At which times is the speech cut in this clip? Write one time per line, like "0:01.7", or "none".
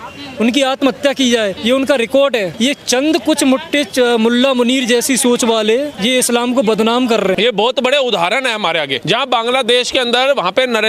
0:01.6
0:02.5
0:05.9
0:07.4
0:09.0